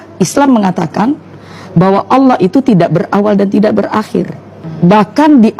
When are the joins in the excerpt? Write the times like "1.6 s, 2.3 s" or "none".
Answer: 4.6 s